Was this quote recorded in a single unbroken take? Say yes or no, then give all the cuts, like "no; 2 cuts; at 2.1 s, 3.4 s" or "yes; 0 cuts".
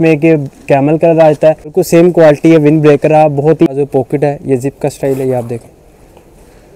no; 2 cuts; at 1.7 s, 3.7 s